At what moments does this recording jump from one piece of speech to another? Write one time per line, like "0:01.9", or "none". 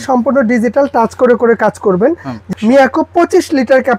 0:02.4